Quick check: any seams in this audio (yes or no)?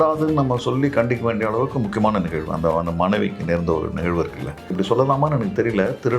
yes